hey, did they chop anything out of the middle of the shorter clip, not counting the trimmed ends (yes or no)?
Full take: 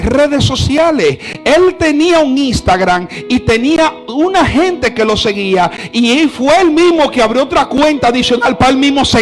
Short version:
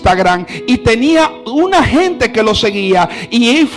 no